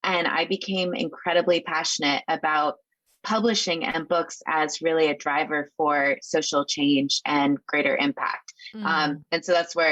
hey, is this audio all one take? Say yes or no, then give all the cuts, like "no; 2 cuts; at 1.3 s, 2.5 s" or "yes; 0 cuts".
yes; 0 cuts